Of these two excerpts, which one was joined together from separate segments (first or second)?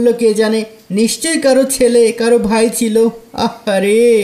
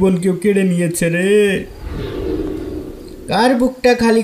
second